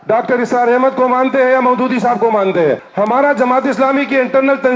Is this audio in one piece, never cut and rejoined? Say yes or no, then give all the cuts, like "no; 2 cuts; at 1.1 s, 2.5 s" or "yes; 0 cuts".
no; 1 cut; at 2.9 s